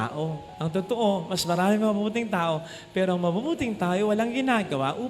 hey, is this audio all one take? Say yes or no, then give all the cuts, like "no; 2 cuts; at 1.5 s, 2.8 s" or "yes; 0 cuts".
yes; 0 cuts